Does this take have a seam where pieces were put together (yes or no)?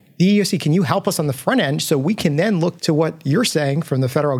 yes